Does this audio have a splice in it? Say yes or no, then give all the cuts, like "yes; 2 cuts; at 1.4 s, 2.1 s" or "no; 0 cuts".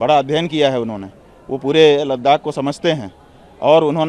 no; 0 cuts